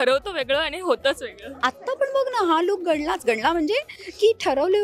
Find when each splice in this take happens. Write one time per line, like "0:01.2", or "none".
none